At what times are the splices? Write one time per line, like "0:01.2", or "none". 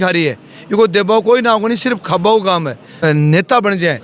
0:02.9